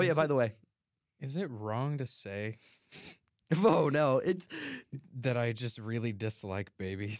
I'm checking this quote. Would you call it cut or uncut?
uncut